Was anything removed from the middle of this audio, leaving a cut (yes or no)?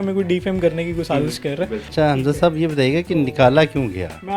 yes